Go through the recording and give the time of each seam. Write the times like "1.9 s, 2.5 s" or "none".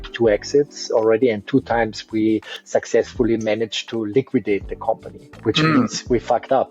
2.6 s